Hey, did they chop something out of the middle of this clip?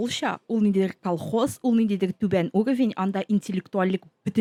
no; 0 cuts

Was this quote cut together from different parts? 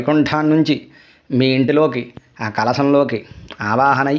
no; 0 cuts

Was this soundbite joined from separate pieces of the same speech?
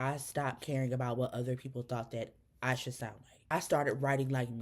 yes; 1 cut; at 3.5 s

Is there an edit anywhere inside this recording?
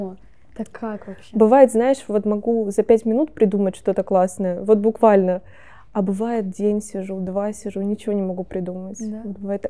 no; 0 cuts

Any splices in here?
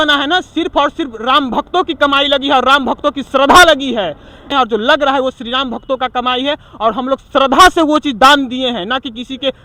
no; 0 cuts

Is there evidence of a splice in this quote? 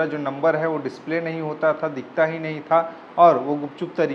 no; 0 cuts

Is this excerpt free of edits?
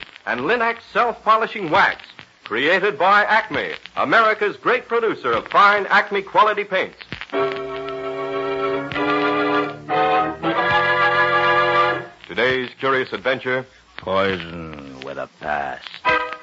no; 1 cut; at 11.2 s

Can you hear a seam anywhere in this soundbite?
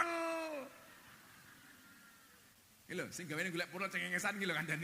yes; 1 cut; at 2.5 s

